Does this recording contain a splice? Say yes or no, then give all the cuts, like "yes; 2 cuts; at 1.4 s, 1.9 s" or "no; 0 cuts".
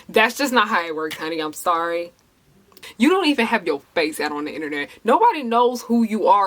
yes; 1 cut; at 2.8 s